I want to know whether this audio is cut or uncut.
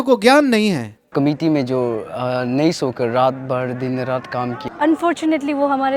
cut